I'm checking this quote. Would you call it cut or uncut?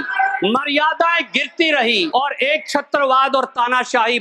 cut